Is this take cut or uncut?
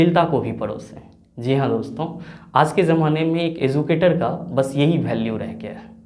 uncut